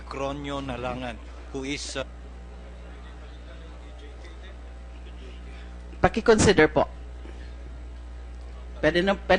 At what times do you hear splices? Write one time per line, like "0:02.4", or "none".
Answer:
none